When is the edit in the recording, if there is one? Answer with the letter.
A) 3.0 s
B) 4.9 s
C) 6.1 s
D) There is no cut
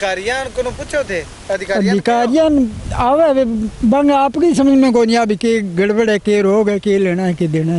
D